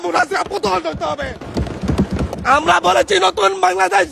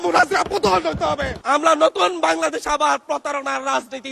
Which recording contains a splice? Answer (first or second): second